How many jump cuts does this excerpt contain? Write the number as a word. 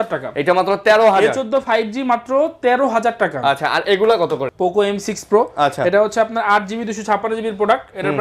one